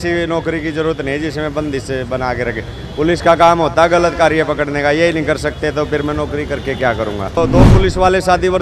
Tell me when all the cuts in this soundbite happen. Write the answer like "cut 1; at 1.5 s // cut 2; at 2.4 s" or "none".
cut 1; at 7.4 s